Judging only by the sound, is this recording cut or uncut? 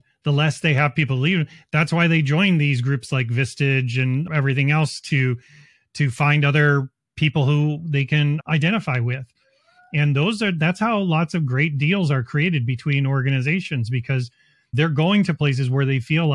cut